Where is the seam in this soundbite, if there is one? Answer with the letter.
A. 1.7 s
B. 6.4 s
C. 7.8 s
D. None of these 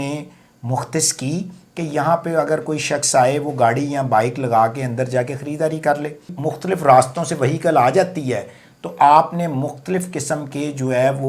B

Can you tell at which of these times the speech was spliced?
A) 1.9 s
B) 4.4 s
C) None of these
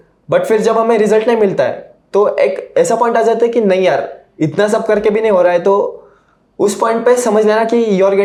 C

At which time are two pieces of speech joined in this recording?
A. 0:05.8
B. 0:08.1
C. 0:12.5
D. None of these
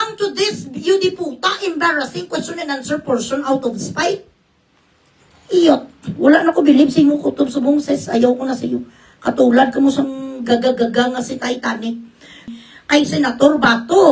C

